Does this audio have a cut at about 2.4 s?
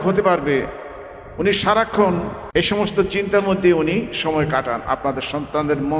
yes; 1 cut; at 2.4 s

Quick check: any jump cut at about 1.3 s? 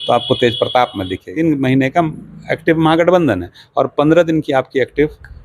yes; 1 cut; at 1.3 s

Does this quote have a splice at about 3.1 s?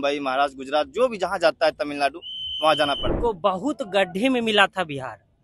yes; 1 cut; at 3.1 s

